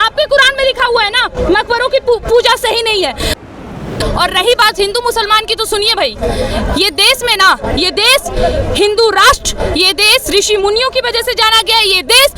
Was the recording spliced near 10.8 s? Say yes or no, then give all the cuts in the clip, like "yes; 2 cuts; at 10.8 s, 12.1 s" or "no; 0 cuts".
no; 1 cut; at 3.5 s